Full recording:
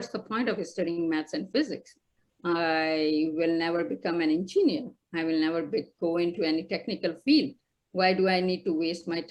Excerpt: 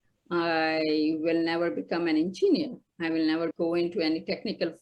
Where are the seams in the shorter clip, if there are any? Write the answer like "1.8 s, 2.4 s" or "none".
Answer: 3.5 s